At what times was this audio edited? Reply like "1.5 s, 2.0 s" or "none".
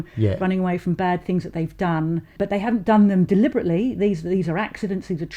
2.3 s